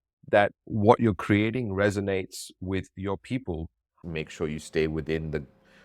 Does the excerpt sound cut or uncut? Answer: cut